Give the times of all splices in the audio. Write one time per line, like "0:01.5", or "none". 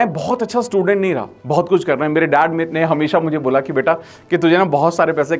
0:01.3